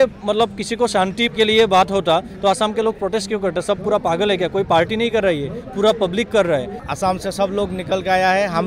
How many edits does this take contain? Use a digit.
2